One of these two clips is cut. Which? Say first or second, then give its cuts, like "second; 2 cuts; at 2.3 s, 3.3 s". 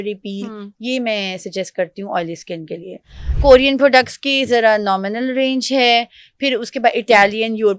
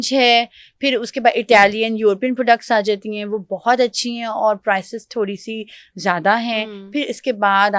first; 1 cut; at 3.3 s